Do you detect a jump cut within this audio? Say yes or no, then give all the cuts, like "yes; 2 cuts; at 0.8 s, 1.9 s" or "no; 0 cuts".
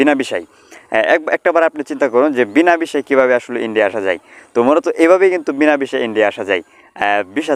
no; 0 cuts